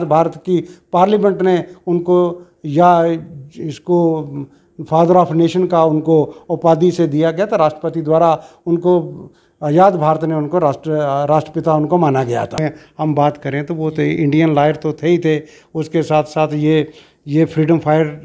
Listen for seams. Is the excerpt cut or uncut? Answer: cut